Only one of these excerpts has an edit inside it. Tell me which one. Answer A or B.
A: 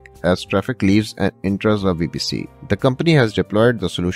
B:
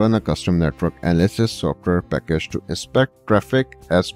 A